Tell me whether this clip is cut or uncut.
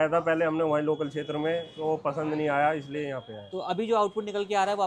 uncut